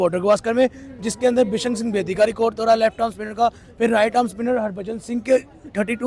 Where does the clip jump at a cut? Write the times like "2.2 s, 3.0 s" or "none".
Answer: none